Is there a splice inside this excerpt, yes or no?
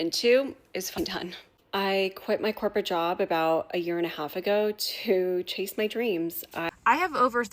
yes